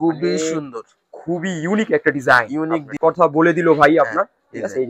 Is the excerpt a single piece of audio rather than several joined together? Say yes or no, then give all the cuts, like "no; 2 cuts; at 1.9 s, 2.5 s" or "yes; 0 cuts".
no; 1 cut; at 2.9 s